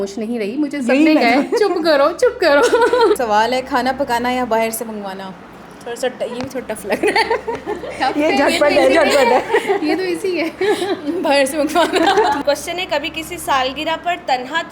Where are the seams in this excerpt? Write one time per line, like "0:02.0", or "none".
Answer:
0:03.2
0:12.4